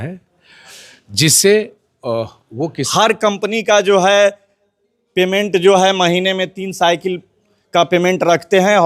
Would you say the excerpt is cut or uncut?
cut